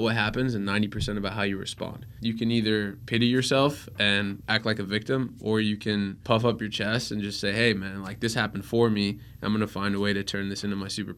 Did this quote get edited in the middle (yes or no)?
yes